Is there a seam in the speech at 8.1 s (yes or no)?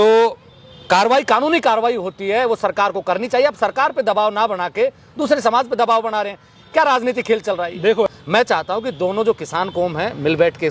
yes